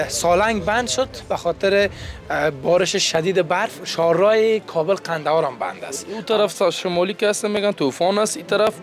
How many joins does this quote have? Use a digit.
1